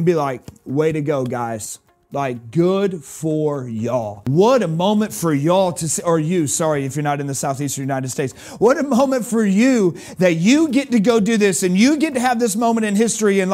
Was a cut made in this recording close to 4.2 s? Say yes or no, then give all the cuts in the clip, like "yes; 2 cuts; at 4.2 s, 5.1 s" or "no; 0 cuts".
yes; 1 cut; at 4.2 s